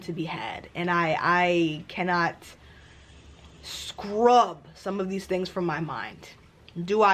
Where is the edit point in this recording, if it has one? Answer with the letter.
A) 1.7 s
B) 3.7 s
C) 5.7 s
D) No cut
D